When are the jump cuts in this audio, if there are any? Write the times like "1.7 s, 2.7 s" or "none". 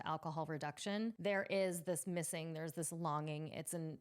1.2 s